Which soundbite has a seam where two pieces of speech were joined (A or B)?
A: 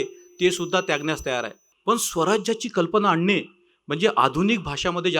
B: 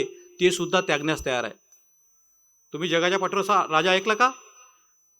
A